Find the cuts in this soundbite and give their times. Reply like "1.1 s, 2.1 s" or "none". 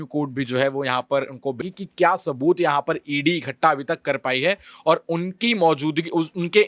1.6 s